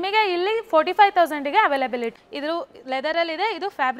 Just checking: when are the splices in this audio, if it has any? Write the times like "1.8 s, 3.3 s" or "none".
2.2 s